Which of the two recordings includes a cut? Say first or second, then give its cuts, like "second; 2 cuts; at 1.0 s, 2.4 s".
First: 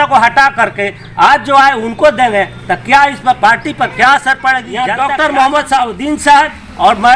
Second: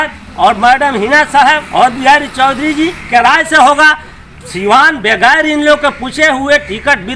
first; 1 cut; at 4.8 s